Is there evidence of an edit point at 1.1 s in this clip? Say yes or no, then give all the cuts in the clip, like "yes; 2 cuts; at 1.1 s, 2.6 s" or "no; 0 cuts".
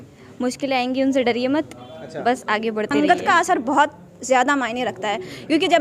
no; 1 cut; at 2.9 s